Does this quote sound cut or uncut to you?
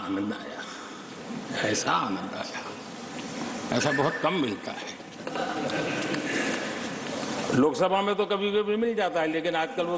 uncut